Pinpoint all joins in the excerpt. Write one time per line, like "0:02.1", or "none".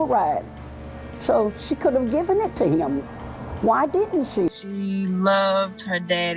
0:04.5